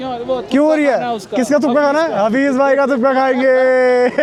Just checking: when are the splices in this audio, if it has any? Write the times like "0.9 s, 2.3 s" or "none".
none

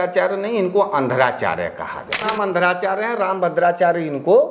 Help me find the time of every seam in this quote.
2.3 s

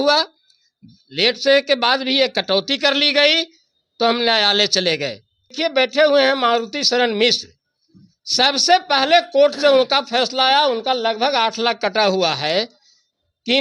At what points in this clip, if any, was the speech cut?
5.5 s

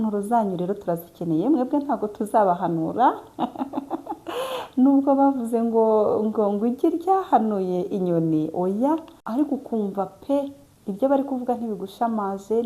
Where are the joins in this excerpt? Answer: 9.2 s

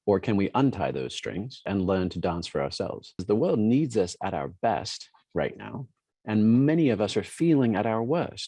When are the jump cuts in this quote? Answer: 1.7 s, 3.1 s

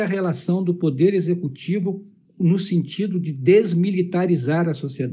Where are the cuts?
none

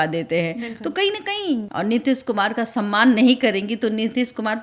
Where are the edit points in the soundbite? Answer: 1.7 s

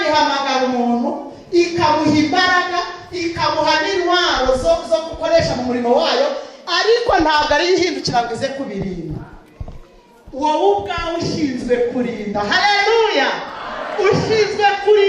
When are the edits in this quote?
none

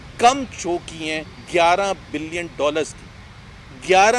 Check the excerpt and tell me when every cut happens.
none

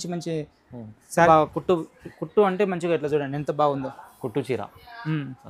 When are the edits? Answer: 1.3 s

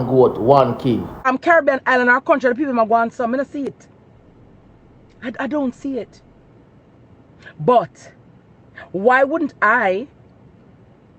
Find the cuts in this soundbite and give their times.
1.2 s

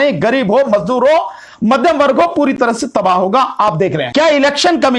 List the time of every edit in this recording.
4.0 s

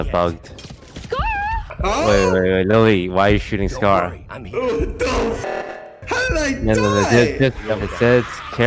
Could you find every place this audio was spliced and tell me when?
1.7 s, 7.7 s

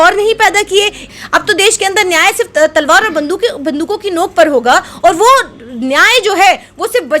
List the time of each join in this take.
1.1 s

